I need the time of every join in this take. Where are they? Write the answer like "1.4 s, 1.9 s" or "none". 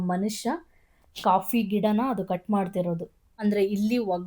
3.3 s